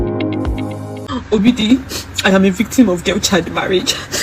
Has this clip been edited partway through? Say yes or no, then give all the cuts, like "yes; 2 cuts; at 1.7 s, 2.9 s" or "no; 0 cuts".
yes; 1 cut; at 1.0 s